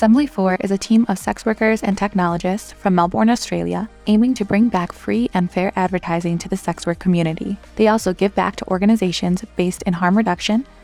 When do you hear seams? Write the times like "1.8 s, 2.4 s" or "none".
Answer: none

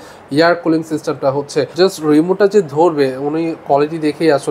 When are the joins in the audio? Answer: 1.7 s

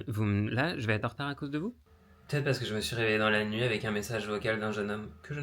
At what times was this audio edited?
1.8 s

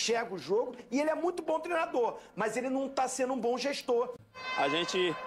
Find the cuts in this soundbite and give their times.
4.1 s

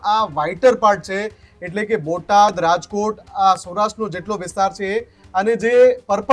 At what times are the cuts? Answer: none

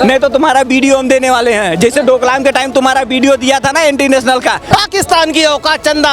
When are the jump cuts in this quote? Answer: 4.7 s

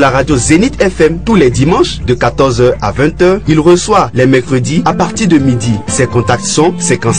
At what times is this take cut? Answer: 1.7 s

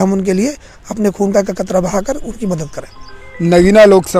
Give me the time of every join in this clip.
none

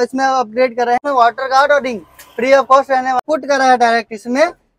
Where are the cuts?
1.0 s, 3.2 s

